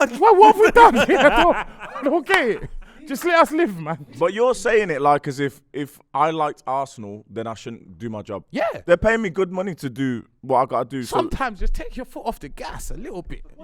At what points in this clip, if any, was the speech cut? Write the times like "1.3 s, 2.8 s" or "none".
3.9 s